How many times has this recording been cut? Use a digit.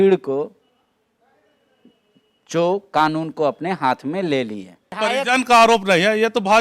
1